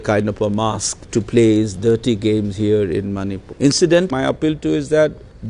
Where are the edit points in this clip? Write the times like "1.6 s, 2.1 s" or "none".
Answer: 4.1 s